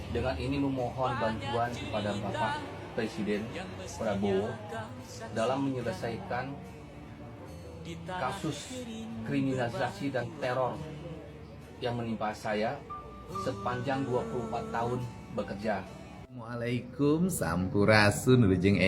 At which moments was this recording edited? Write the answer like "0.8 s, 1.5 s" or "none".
none